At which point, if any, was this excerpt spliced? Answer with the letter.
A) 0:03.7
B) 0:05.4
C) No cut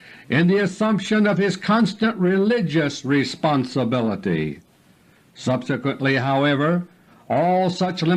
C